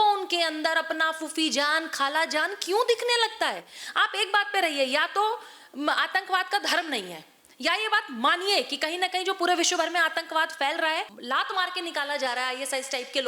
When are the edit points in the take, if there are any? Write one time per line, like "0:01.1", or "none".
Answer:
0:11.1